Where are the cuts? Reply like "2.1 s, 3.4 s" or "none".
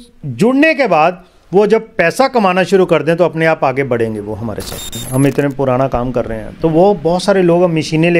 5.0 s